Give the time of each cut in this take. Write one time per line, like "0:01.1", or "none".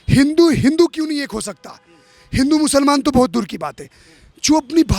none